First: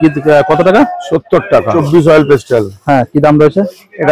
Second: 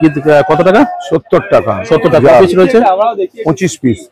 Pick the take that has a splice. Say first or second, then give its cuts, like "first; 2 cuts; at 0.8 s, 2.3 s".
first; 1 cut; at 1.8 s